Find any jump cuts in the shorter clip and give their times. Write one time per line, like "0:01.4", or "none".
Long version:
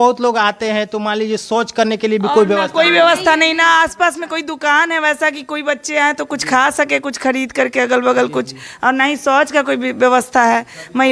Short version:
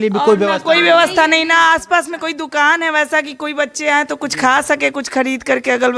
none